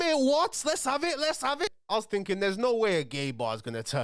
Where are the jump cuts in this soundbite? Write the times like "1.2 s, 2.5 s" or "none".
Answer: 1.7 s

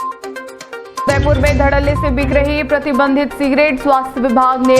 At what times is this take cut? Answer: 1.1 s

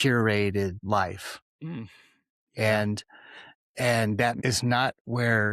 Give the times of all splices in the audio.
0.8 s, 4.4 s

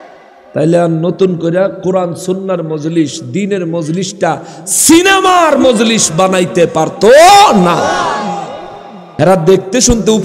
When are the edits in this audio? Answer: 9.0 s

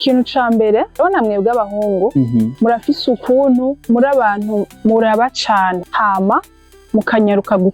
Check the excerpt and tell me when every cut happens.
1.0 s, 2.5 s, 3.8 s, 5.9 s

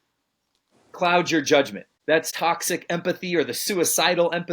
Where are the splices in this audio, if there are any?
2.2 s

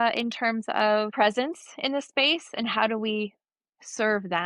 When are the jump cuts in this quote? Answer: 1.1 s

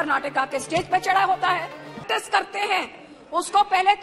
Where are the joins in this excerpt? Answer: 2.1 s

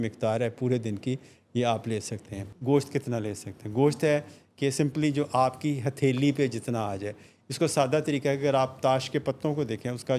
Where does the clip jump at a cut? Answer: 2.5 s

